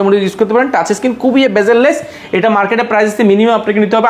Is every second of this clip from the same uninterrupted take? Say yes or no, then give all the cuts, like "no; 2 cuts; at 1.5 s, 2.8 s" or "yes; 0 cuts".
yes; 0 cuts